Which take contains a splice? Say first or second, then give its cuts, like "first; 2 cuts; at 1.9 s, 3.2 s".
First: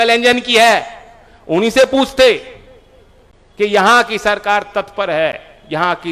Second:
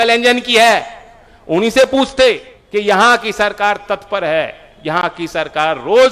second; 1 cut; at 2.5 s